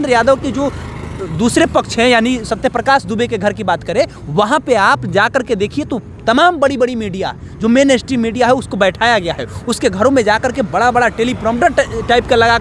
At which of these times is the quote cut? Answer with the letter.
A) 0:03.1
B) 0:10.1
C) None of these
C